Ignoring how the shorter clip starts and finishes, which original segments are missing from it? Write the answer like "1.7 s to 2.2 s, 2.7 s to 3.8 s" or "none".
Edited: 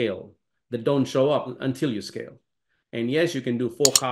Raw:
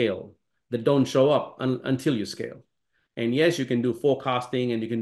1.5 s to 1.8 s